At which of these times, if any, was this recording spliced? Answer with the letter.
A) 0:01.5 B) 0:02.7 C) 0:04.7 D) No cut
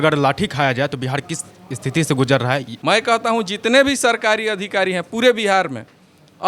B